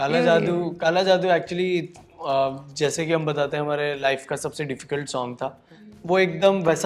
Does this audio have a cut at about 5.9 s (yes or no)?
yes